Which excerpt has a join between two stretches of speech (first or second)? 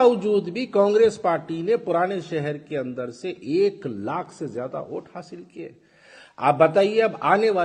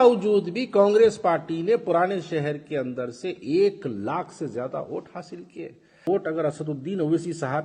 second